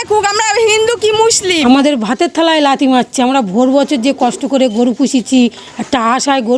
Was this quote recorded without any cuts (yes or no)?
no